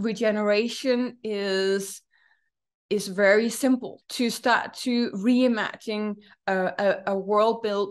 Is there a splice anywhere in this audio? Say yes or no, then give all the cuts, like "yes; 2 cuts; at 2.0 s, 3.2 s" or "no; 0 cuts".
yes; 1 cut; at 4.0 s